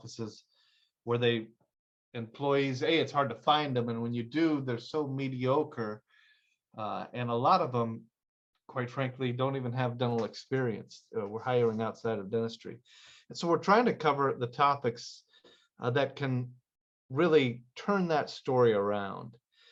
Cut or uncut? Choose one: uncut